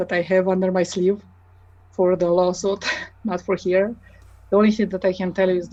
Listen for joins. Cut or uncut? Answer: uncut